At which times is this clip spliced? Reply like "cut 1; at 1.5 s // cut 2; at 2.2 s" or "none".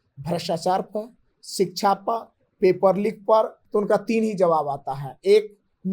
cut 1; at 3.6 s